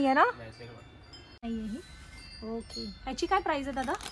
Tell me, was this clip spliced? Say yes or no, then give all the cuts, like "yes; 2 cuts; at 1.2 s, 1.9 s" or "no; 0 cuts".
yes; 1 cut; at 1.4 s